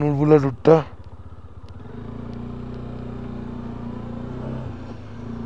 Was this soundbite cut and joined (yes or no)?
no